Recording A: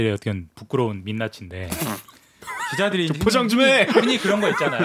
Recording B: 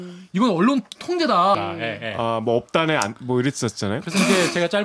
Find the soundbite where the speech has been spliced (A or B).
B